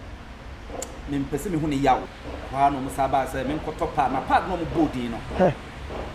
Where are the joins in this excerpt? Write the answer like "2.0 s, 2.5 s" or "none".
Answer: 2.2 s